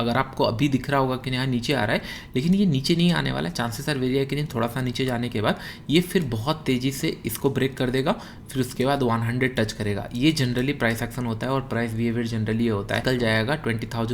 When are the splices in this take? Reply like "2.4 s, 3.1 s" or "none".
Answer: 13.0 s